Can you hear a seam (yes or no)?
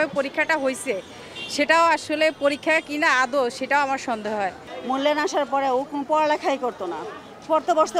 no